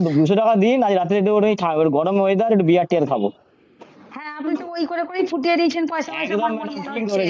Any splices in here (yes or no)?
no